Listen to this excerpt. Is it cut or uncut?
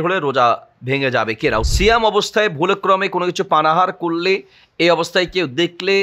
cut